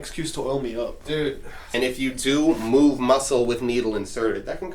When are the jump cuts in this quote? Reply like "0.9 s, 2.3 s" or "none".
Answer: 1.5 s